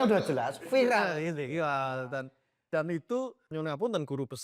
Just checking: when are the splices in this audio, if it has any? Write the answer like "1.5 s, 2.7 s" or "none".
none